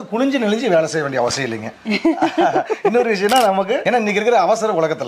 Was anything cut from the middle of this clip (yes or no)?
no